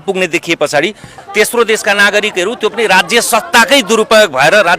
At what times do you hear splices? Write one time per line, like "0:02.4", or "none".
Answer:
0:01.1